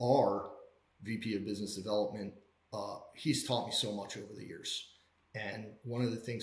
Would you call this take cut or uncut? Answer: uncut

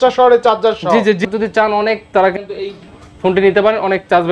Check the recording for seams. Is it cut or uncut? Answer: cut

